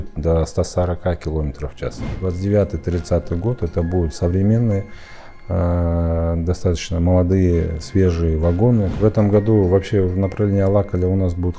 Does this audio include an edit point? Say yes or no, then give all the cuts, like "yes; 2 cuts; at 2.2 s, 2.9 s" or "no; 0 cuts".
yes; 2 cuts; at 2.0 s, 9.0 s